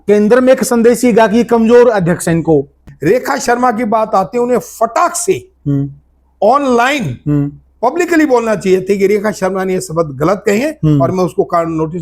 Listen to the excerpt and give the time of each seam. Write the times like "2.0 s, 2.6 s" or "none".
2.9 s